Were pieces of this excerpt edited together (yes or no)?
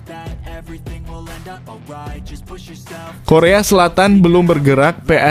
yes